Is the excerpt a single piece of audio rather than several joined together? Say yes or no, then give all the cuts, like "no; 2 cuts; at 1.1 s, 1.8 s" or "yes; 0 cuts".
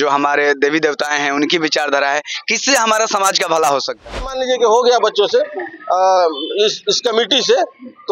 no; 1 cut; at 4.4 s